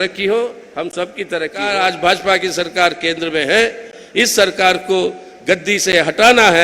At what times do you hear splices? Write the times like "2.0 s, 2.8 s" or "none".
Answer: 1.6 s